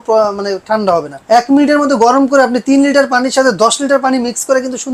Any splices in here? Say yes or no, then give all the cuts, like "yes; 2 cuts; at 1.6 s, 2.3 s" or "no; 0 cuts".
yes; 1 cut; at 1.1 s